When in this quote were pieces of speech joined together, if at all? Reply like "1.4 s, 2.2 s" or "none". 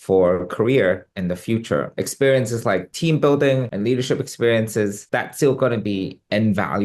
1.9 s, 5.0 s